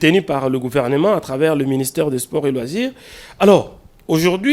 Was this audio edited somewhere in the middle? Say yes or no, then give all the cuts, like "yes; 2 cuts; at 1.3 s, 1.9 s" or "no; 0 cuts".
no; 0 cuts